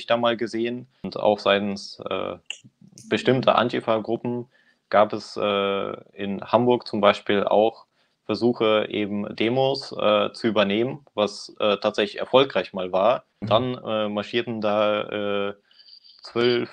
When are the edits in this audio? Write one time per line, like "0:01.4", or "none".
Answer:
0:01.1
0:13.4